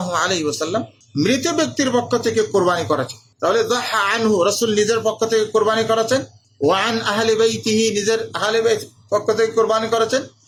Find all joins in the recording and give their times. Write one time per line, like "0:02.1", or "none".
none